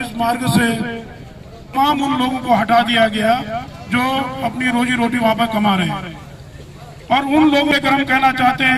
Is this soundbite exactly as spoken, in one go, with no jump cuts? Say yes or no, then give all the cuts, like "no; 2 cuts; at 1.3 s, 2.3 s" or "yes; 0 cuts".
no; 2 cuts; at 1.7 s, 7.7 s